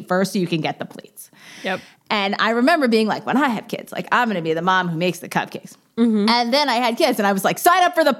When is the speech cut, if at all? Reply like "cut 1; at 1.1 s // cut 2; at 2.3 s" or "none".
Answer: none

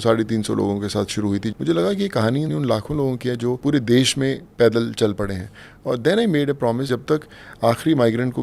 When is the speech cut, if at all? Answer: cut 1; at 1.5 s // cut 2; at 2.5 s // cut 3; at 3.6 s // cut 4; at 6.9 s

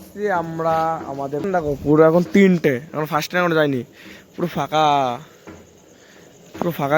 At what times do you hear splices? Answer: cut 1; at 1.5 s

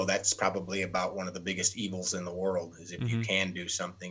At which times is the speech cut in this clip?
none

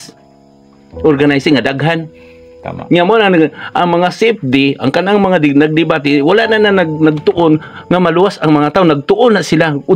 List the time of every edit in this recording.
none

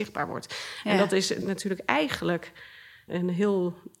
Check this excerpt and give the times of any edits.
cut 1; at 1.4 s // cut 2; at 3.1 s

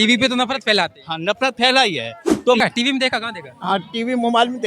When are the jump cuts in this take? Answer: cut 1; at 2.6 s

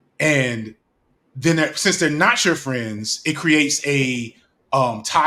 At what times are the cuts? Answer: none

